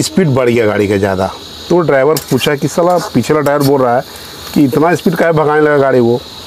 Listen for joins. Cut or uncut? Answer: uncut